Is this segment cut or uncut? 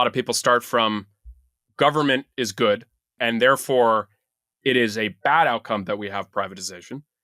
cut